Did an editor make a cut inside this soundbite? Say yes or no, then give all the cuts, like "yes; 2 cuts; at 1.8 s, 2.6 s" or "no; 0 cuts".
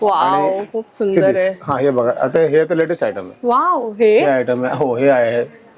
no; 0 cuts